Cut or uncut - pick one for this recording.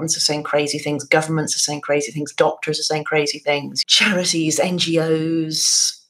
cut